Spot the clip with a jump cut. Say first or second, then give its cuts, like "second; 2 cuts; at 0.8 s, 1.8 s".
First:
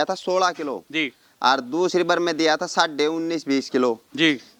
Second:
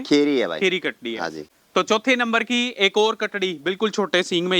second; 1 cut; at 1.5 s